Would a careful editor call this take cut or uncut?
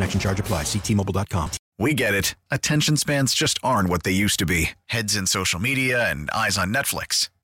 cut